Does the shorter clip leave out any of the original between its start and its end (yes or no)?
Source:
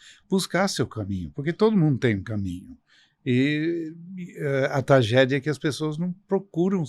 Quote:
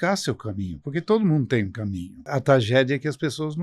yes